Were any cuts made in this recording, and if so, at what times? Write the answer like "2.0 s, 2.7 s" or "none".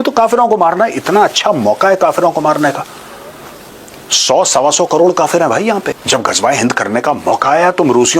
6.0 s